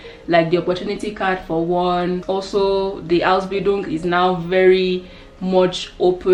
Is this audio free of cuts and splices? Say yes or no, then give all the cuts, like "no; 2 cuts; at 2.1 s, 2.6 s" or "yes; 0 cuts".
yes; 0 cuts